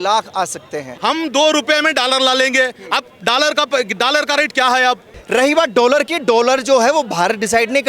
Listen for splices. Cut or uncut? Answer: cut